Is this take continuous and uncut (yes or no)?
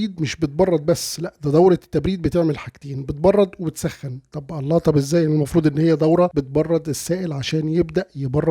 no